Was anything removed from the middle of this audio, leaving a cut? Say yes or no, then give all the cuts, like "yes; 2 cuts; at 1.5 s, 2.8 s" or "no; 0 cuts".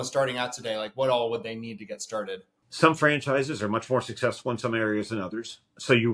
yes; 1 cut; at 2.6 s